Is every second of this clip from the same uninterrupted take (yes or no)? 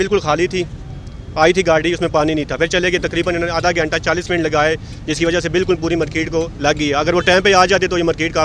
yes